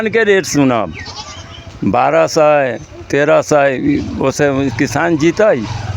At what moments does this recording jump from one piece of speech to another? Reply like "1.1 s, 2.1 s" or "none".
none